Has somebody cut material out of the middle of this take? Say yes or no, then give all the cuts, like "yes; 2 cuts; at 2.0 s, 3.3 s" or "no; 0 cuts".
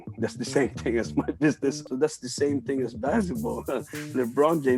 yes; 1 cut; at 1.8 s